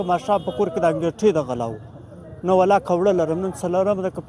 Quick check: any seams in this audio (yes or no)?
no